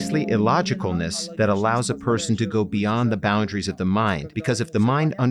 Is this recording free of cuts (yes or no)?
no